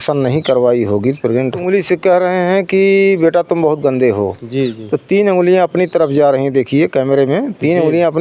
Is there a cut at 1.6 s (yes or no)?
yes